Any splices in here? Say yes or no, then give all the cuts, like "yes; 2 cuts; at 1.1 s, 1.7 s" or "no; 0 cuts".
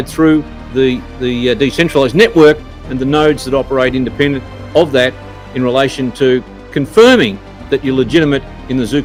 no; 0 cuts